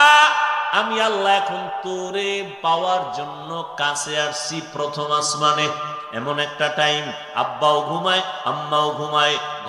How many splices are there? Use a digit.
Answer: 1